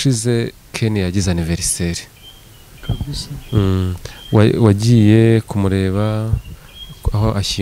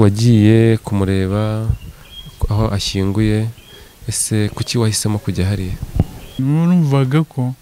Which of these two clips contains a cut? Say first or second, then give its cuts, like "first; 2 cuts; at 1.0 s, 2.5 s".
second; 1 cut; at 6.4 s